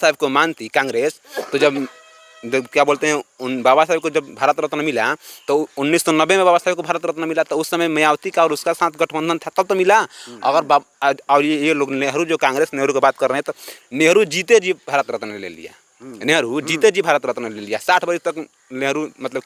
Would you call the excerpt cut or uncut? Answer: uncut